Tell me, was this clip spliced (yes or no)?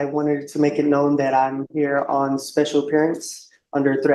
no